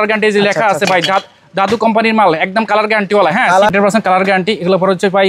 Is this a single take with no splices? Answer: no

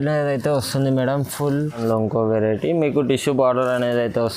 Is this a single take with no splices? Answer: no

